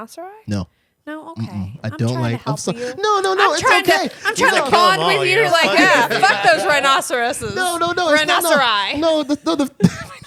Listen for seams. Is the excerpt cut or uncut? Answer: uncut